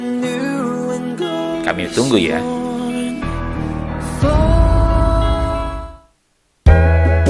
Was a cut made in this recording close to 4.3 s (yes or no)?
no